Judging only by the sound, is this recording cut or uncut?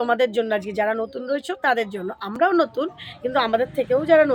uncut